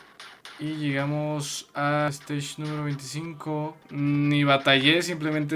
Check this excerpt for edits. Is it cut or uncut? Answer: cut